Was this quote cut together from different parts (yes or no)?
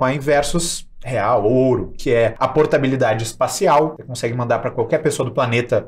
yes